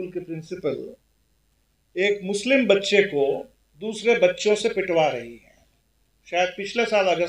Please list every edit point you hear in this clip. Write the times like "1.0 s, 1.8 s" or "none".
none